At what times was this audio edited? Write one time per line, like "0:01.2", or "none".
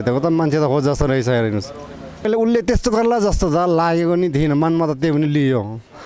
0:02.2